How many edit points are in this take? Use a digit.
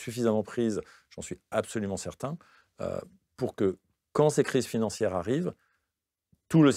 0